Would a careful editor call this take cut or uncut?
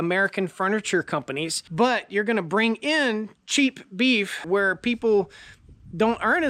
cut